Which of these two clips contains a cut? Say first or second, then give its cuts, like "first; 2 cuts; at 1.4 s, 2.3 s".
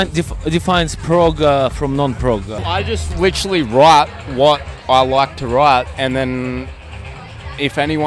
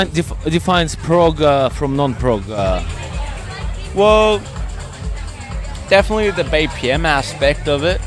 first; 1 cut; at 2.6 s